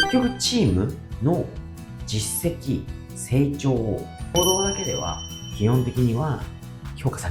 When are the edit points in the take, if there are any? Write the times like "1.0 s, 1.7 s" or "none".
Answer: 4.3 s